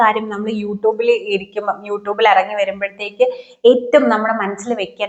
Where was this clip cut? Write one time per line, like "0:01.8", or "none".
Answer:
none